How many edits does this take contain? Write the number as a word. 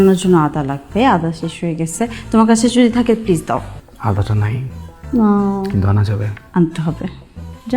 one